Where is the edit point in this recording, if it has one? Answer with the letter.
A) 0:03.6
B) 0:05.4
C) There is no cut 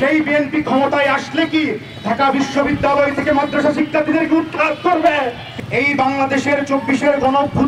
B